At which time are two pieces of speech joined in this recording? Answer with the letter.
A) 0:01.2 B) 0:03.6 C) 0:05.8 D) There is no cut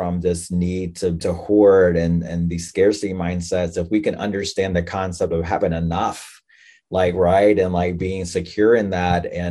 A